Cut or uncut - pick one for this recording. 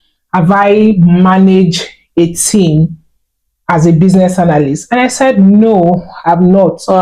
uncut